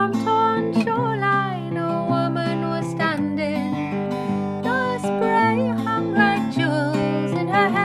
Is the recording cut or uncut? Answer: uncut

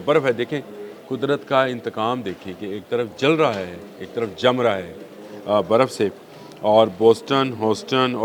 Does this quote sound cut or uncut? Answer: uncut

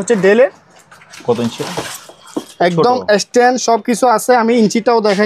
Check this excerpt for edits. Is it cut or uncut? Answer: uncut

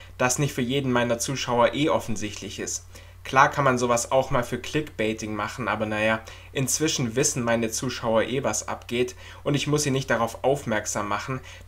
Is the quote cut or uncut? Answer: cut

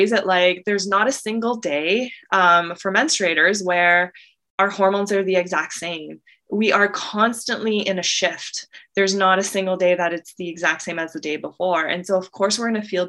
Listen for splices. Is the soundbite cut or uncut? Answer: uncut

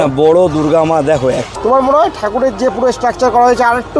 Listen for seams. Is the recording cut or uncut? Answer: cut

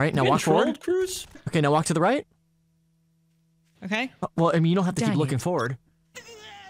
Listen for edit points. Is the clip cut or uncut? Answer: cut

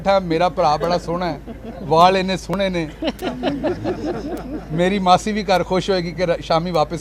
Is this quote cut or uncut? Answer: uncut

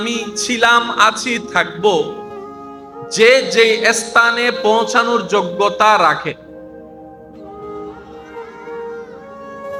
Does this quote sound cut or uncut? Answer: uncut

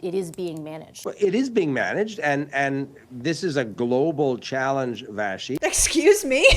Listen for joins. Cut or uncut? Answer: cut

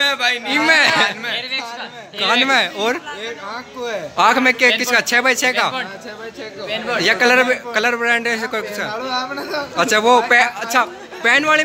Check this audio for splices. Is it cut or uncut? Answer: uncut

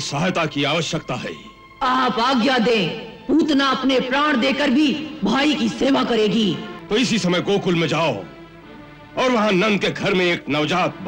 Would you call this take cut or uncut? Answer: cut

